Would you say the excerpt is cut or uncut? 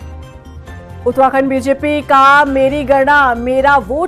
uncut